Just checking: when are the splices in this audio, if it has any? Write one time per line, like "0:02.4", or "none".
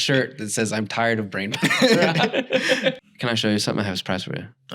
0:03.0

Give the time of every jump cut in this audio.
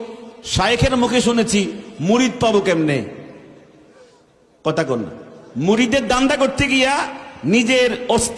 none

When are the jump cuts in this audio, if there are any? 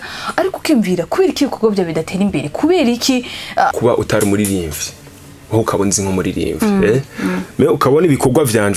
0:03.7

